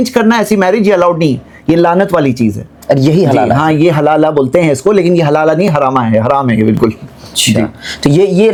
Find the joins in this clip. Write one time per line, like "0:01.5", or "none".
none